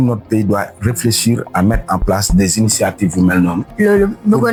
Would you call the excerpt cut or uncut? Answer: uncut